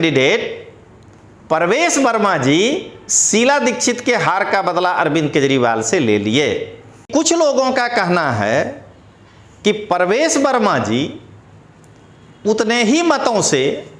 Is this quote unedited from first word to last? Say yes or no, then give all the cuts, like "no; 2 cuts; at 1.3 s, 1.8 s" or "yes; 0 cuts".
no; 1 cut; at 7.0 s